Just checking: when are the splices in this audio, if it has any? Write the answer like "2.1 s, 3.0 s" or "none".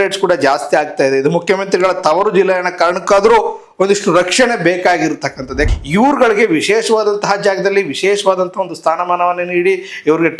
5.7 s